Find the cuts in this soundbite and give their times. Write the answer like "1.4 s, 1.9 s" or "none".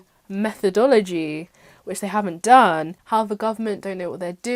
3.0 s